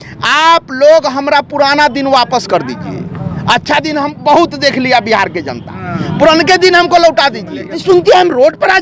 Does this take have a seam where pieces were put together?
yes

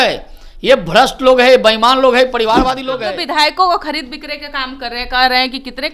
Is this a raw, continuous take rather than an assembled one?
no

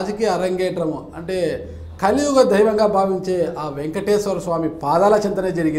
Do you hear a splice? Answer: no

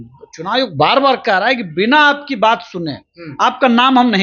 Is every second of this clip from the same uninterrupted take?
yes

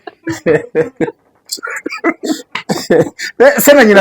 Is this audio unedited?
yes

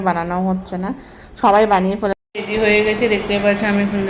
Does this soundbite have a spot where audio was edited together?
yes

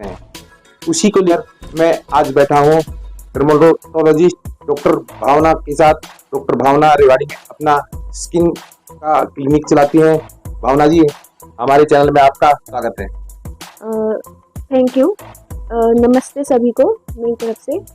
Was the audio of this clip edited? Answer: yes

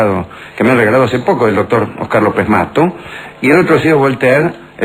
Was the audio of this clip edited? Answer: yes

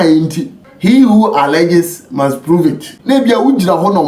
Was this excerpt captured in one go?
no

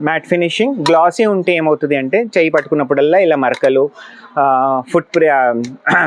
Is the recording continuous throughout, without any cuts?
yes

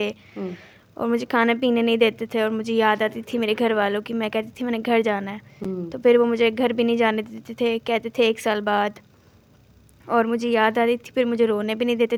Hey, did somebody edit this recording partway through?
no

